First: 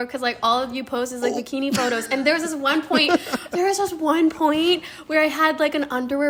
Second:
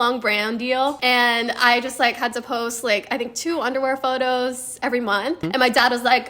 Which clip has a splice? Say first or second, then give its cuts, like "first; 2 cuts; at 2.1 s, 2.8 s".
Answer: second; 2 cuts; at 1.0 s, 5.4 s